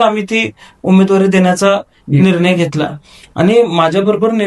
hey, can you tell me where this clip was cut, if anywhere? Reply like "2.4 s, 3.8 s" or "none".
none